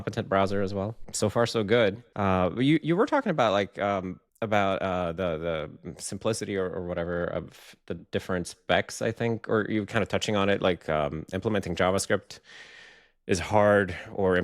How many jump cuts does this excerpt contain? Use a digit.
3